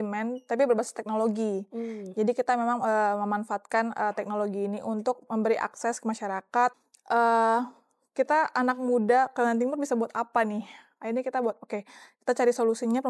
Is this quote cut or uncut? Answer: cut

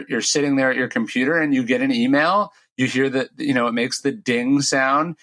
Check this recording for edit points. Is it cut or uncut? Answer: uncut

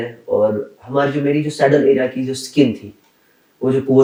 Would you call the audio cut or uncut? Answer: uncut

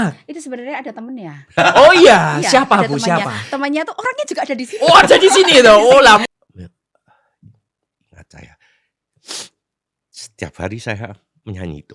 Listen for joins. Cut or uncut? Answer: cut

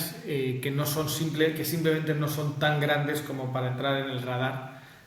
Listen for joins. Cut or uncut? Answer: uncut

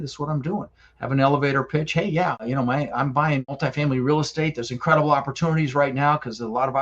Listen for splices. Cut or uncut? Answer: cut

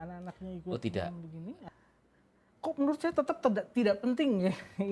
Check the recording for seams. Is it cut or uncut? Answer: cut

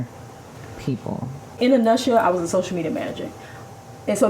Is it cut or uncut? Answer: cut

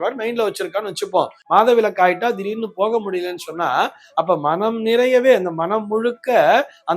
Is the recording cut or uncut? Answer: cut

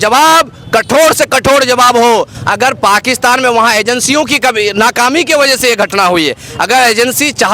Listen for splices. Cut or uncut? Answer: uncut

